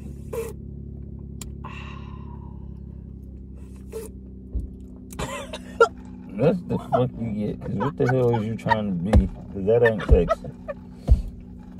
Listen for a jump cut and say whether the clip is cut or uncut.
uncut